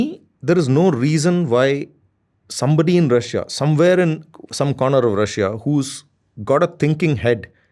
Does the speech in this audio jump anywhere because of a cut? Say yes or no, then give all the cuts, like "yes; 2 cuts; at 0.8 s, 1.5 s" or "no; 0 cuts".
no; 0 cuts